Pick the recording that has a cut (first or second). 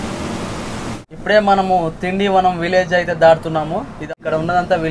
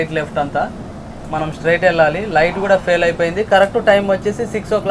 first